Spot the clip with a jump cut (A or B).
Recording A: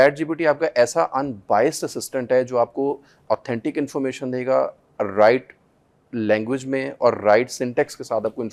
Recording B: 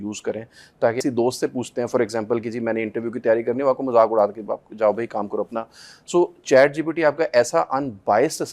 B